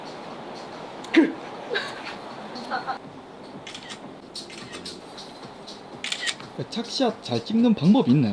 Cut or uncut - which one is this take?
uncut